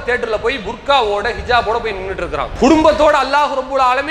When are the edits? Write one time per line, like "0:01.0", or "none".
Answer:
0:02.5